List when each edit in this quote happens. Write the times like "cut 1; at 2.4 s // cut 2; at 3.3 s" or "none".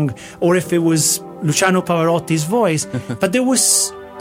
cut 1; at 3.2 s